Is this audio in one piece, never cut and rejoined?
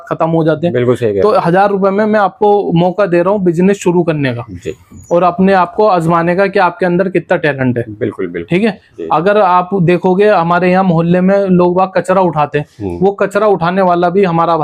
yes; 0 cuts

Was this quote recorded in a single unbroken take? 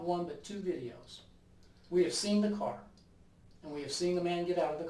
yes; 0 cuts

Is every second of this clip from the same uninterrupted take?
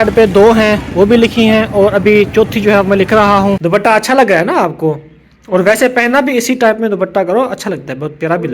no; 1 cut; at 3.6 s

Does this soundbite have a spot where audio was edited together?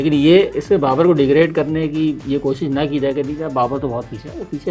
no; 0 cuts

